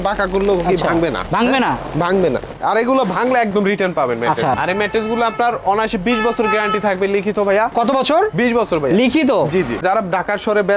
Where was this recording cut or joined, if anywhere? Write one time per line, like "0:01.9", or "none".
0:02.5
0:04.5
0:09.8